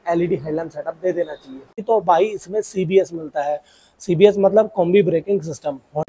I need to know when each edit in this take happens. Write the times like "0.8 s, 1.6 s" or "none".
1.7 s